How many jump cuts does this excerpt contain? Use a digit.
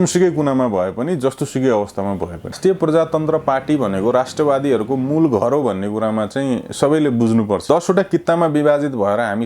2